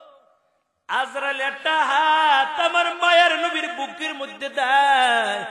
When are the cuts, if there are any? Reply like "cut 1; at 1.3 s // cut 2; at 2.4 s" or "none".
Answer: none